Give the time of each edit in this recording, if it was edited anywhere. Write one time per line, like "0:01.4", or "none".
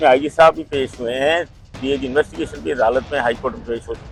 none